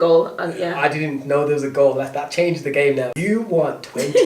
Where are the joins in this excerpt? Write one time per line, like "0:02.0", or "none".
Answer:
0:03.2